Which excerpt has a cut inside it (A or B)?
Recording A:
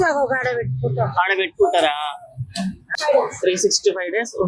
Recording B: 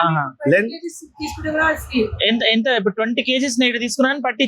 A